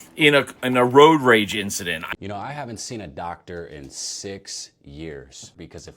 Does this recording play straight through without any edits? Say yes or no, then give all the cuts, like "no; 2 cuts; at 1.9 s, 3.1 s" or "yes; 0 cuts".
no; 1 cut; at 2.1 s